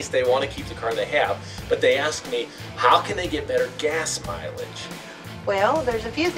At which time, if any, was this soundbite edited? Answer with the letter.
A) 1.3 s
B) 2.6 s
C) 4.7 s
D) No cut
D